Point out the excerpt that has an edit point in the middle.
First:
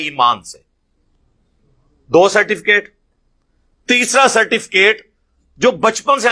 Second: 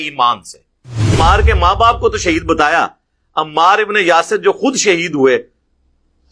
second; 1 cut; at 1.1 s

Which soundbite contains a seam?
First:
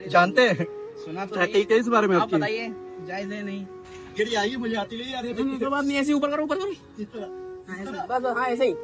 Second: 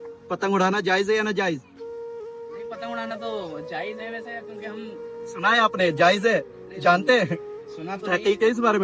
first; 1 cut; at 4.0 s

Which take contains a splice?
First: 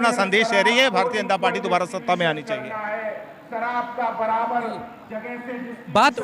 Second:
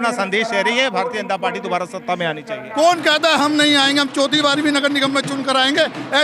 second; 1 cut; at 2.6 s

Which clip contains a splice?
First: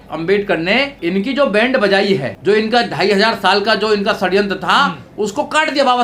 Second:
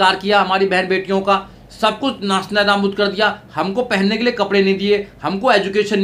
first; 2 cuts; at 0.9 s, 2.3 s

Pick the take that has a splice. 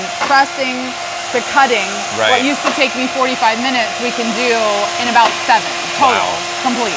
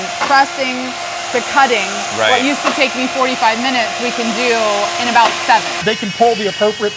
second; 1 cut; at 5.8 s

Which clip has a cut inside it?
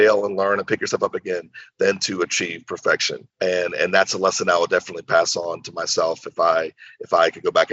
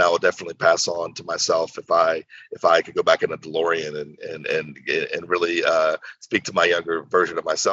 first; 1 cut; at 3.2 s

